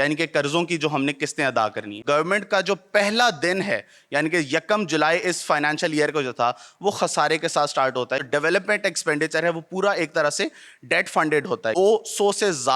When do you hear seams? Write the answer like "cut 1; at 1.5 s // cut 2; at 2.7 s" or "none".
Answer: cut 1; at 2.0 s // cut 2; at 8.2 s // cut 3; at 11.8 s